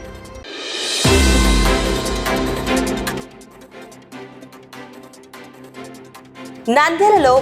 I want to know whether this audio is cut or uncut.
uncut